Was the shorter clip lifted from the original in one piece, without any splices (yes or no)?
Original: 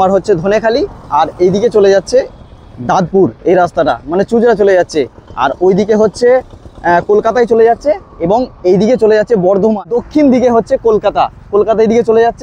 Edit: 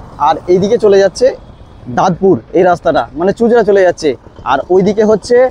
yes